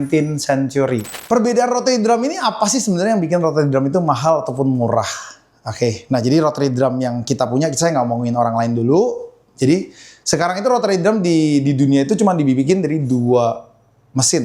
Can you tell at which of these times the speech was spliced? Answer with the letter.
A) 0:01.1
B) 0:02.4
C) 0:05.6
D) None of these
A